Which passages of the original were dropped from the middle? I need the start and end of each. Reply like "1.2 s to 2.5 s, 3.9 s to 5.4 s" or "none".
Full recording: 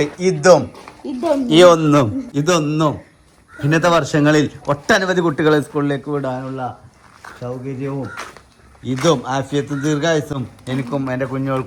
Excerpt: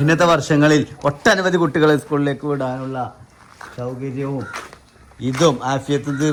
none